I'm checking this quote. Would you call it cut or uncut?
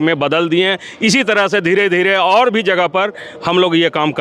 uncut